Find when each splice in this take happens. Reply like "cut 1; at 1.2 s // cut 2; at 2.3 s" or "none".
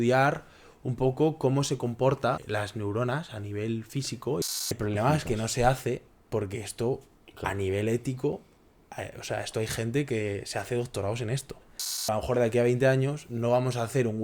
cut 1; at 2.4 s // cut 2; at 4.6 s // cut 3; at 12.0 s